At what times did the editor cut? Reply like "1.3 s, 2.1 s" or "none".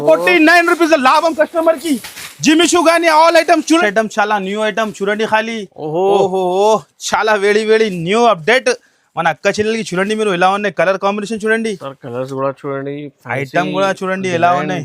3.8 s